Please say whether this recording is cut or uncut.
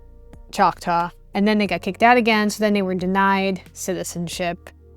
cut